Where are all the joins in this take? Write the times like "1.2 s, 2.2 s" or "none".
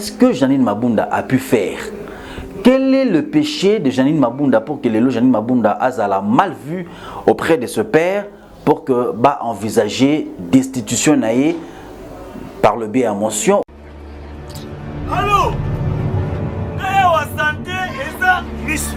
13.6 s